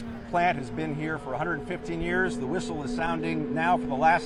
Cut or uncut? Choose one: uncut